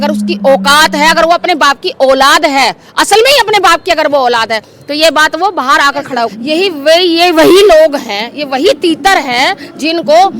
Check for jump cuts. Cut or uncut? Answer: cut